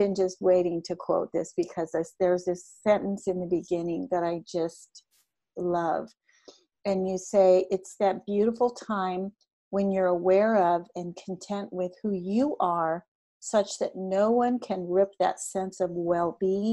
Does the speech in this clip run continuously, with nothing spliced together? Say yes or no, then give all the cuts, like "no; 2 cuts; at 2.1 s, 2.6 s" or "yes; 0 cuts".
yes; 0 cuts